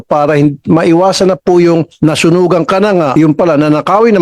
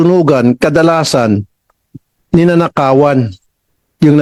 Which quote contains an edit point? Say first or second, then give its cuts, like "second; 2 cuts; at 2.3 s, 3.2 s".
first; 1 cut; at 3.1 s